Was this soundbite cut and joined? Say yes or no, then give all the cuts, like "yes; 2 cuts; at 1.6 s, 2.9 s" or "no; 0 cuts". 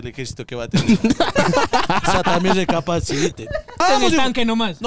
yes; 1 cut; at 3.8 s